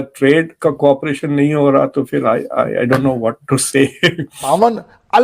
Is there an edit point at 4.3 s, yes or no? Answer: yes